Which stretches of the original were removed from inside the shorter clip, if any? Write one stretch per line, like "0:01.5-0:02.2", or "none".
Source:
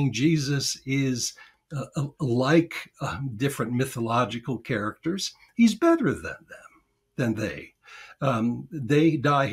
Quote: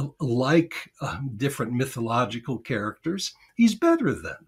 none